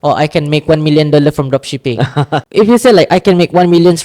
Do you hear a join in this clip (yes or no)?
no